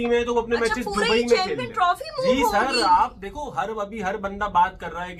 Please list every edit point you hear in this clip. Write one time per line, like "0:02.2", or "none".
none